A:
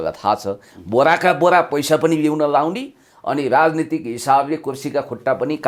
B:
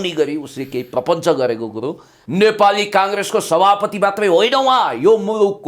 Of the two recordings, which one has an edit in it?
B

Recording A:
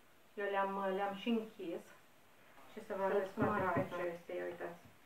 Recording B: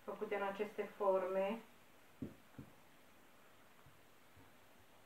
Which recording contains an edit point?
A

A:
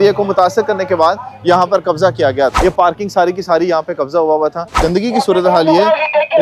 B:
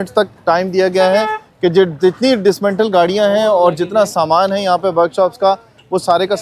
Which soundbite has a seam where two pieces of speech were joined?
A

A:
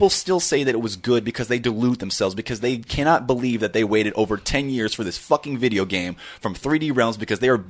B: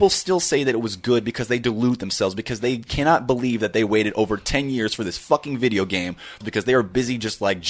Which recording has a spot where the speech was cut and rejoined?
B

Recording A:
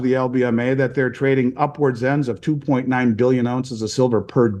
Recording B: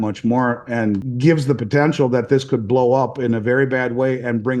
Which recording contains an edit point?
B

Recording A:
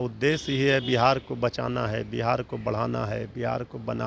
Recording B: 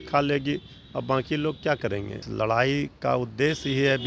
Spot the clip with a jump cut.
B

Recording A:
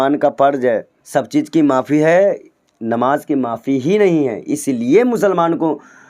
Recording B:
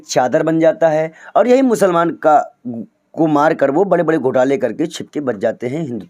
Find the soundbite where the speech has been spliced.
A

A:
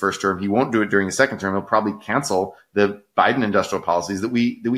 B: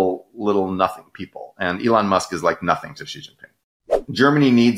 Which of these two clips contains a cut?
B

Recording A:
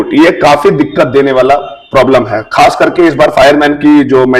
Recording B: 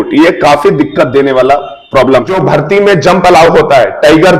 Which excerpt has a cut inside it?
B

